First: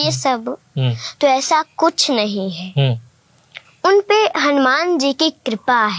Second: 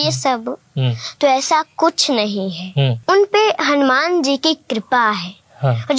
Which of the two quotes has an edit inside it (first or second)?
second